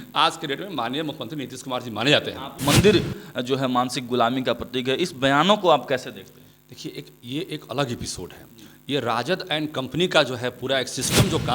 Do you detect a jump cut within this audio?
yes; 1 cut; at 2.5 s

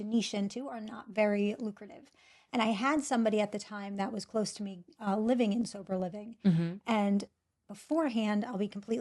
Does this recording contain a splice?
no; 0 cuts

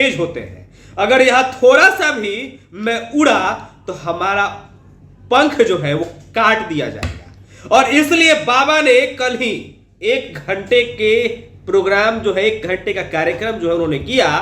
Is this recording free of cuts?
yes; 0 cuts

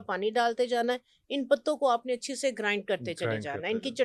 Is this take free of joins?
yes; 0 cuts

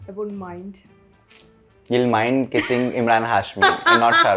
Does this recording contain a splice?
no; 0 cuts

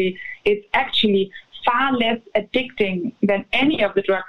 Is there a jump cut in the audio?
no; 0 cuts

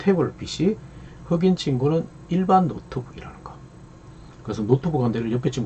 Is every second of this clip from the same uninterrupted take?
yes; 0 cuts

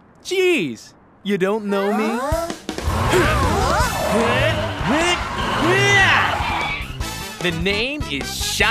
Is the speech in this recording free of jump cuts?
yes; 0 cuts

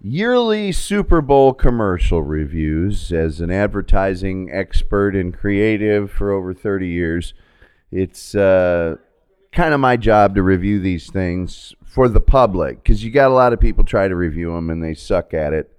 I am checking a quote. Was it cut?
no; 0 cuts

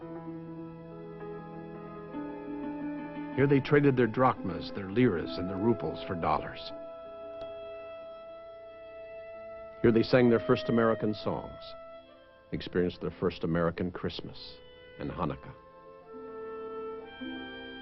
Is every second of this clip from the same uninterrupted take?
no; 1 cut; at 10.6 s

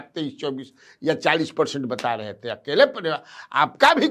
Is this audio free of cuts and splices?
yes; 0 cuts

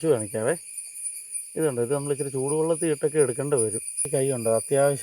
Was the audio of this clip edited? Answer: yes; 1 cut; at 4.1 s

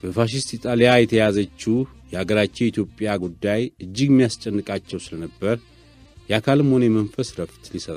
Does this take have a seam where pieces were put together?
no; 0 cuts

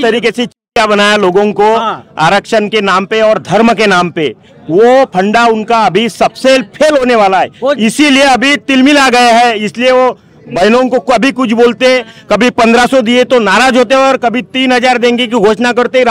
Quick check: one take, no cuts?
yes; 0 cuts

